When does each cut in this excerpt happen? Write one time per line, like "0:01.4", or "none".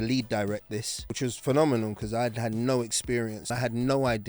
0:01.1
0:03.5